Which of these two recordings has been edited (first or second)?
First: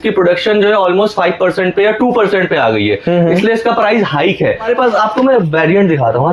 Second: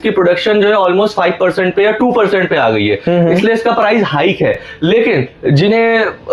first